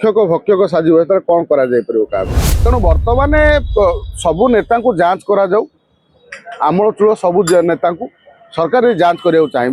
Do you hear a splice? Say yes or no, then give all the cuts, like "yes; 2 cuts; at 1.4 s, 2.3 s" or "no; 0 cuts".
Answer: yes; 1 cut; at 2.4 s